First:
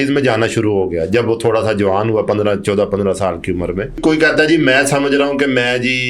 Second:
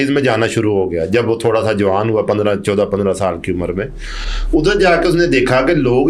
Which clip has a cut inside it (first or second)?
first